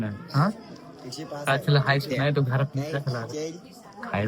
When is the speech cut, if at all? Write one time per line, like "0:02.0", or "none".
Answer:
none